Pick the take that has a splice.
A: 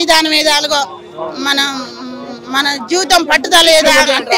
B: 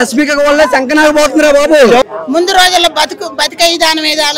B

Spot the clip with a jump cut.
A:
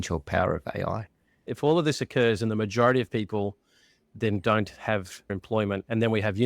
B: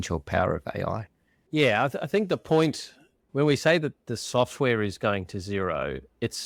A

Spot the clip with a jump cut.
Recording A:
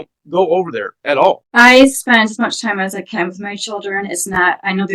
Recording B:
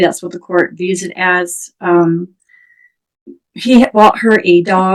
A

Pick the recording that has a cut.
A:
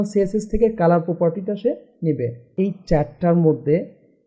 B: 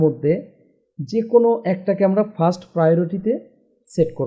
A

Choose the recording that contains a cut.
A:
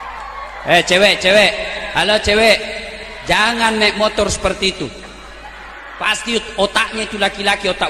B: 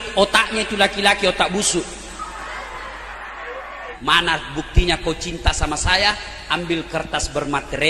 B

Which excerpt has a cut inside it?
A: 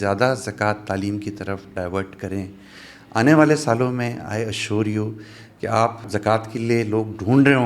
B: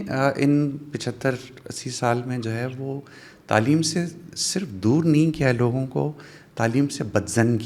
A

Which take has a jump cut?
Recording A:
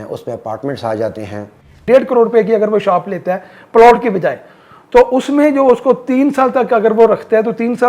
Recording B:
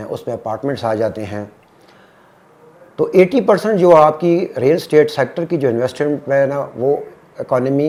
A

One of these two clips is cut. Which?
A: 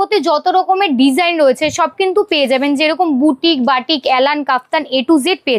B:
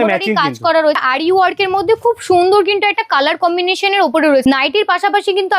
B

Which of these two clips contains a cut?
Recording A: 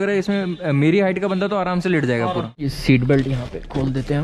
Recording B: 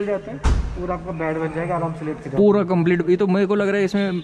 A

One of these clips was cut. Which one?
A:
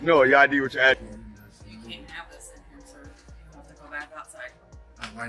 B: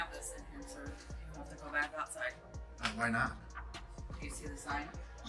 A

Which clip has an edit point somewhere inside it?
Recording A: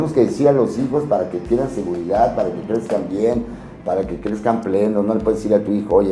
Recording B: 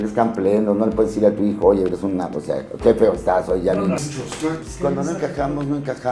B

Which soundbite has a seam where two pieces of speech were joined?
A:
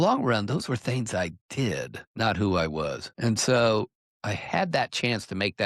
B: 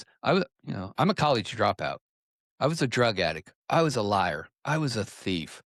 A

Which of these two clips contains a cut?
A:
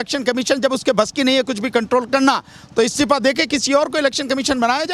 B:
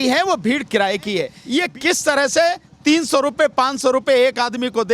B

